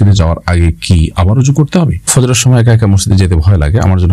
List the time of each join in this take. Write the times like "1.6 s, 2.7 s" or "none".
2.1 s

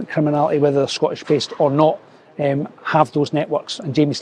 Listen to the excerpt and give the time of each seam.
none

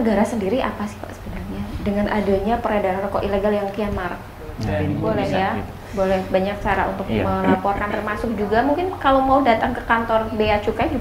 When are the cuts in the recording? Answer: 4.7 s

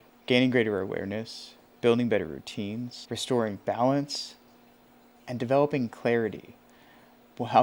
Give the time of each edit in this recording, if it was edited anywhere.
none

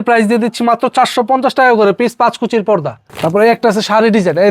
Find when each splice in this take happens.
3.0 s

